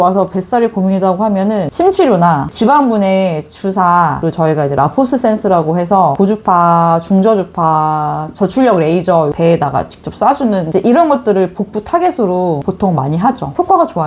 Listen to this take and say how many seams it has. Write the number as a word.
three